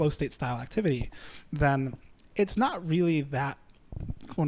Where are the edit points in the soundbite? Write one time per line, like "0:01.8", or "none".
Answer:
none